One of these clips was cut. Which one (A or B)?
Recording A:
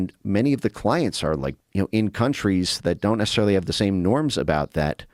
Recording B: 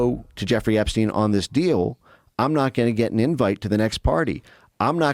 A